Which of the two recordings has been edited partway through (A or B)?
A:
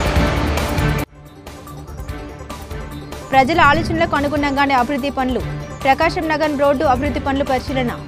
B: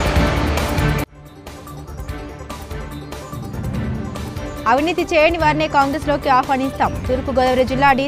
B